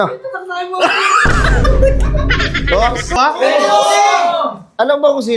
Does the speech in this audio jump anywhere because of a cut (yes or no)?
yes